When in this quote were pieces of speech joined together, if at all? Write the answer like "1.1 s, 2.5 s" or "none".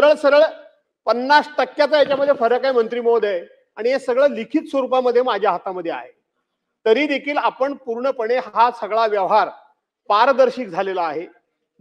none